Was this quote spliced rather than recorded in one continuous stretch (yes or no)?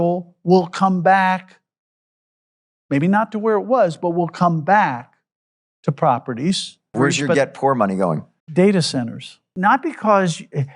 yes